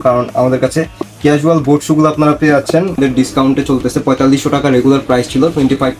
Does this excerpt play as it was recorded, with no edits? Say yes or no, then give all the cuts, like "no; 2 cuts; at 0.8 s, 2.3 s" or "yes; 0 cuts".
no; 1 cut; at 3.0 s